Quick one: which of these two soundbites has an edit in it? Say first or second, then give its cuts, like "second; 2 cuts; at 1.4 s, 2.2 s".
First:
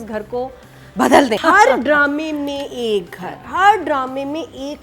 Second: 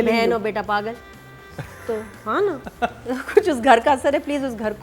first; 1 cut; at 1.4 s